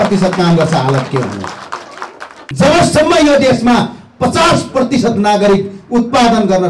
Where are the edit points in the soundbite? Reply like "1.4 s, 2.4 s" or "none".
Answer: 2.4 s